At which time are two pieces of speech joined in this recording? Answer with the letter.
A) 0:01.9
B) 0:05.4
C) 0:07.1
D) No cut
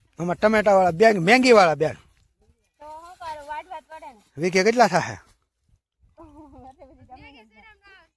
D